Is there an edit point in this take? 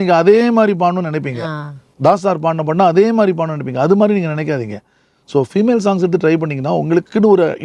no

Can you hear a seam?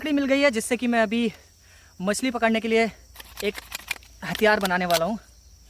no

